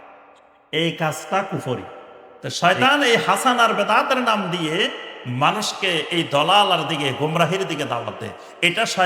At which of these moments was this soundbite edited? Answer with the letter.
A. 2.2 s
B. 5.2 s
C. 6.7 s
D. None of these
A